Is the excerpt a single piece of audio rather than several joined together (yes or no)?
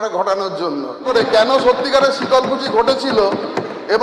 no